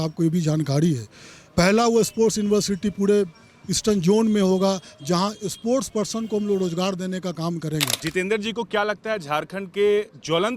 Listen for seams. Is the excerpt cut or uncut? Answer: cut